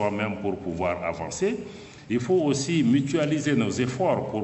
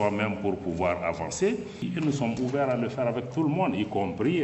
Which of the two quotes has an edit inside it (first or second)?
second